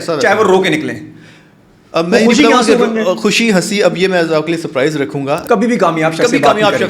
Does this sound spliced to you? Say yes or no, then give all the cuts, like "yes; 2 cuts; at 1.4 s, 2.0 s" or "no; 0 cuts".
yes; 1 cut; at 5.4 s